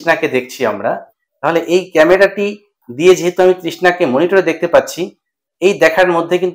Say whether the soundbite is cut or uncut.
uncut